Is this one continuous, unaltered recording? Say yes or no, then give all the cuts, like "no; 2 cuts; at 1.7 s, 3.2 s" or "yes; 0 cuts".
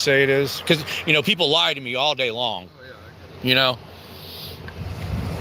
yes; 0 cuts